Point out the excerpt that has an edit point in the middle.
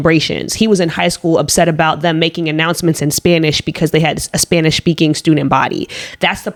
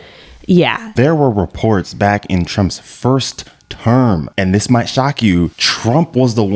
second; 2 cuts; at 0.9 s, 5.7 s

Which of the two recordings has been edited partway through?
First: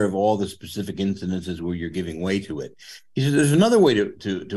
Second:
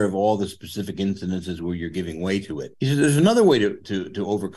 second; 1 cut; at 2.7 s

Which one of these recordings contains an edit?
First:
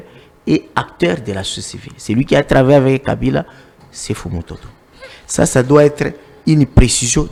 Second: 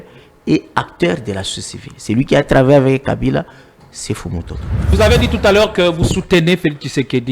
second; 1 cut; at 4.8 s

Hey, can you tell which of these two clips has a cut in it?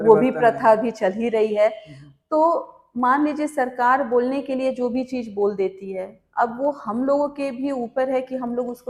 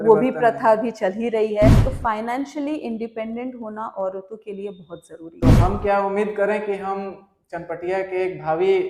second; 2 cuts; at 1.9 s, 5.3 s

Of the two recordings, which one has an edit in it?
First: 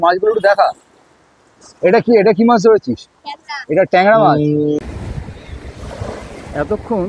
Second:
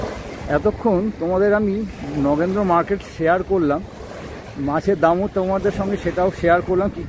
first; 1 cut; at 4.8 s

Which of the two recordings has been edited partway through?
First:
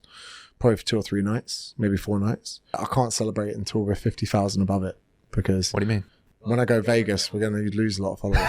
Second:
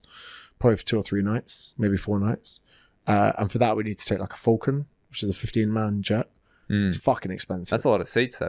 first; 1 cut; at 2.8 s

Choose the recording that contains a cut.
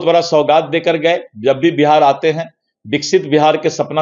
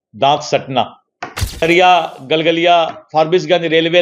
second; 1 cut; at 1.6 s

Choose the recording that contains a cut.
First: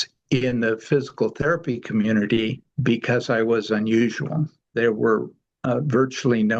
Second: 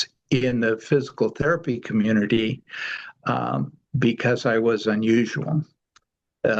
first; 2 cuts; at 2.7 s, 4.7 s

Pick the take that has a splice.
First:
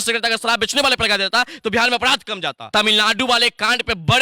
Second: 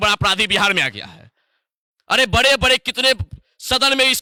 first; 1 cut; at 2.7 s

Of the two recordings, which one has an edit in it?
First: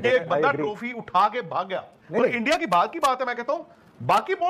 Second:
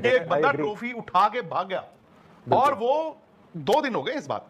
first; 1 cut; at 2.0 s

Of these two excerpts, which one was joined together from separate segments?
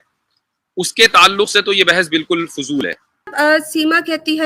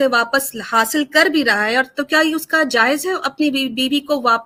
first; 1 cut; at 3.3 s

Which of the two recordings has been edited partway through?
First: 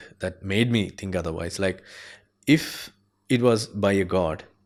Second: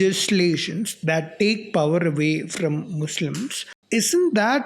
second; 1 cut; at 3.7 s

